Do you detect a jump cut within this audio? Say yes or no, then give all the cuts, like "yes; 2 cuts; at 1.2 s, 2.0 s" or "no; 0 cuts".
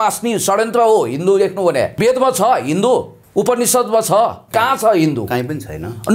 yes; 3 cuts; at 1.9 s, 3.2 s, 4.4 s